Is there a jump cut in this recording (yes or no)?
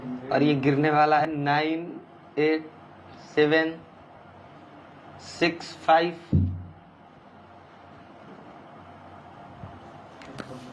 yes